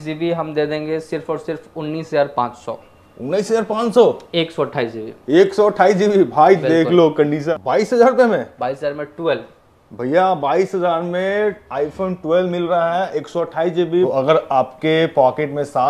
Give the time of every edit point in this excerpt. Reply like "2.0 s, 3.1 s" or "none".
7.5 s, 14.1 s